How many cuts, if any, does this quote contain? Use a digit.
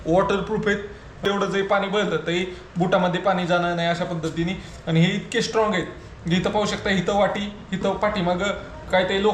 1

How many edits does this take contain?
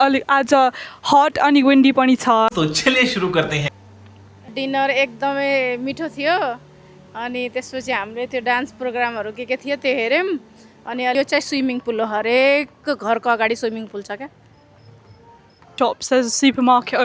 3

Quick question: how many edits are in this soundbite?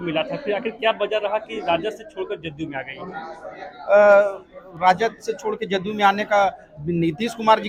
0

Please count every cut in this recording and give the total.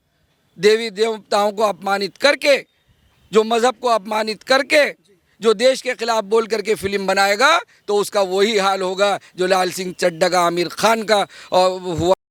0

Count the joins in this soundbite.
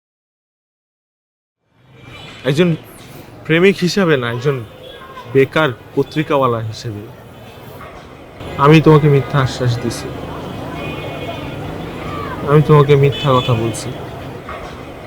1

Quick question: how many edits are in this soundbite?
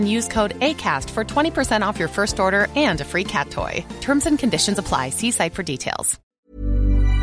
1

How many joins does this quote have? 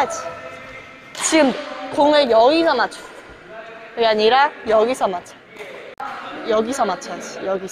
1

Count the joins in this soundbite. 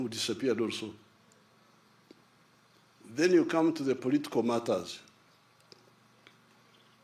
0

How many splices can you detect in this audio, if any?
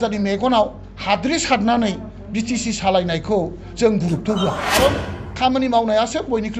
1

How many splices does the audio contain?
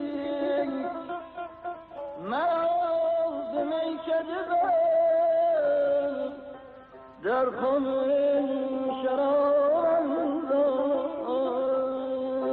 1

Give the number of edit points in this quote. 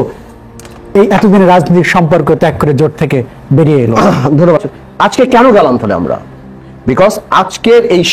1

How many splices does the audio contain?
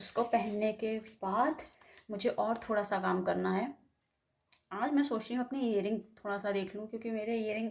0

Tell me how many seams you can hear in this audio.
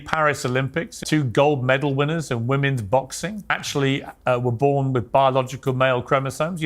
2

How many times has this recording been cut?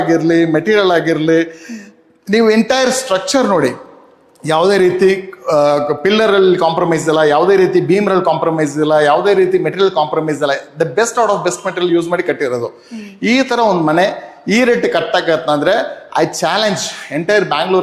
0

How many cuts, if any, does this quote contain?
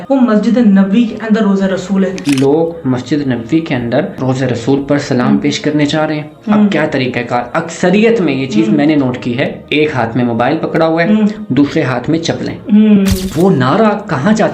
2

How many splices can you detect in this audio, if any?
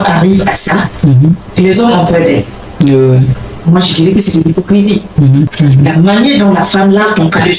2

